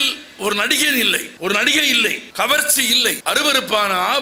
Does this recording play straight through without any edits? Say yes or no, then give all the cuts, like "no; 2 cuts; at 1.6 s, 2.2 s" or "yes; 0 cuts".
no; 3 cuts; at 1.3 s, 2.2 s, 3.2 s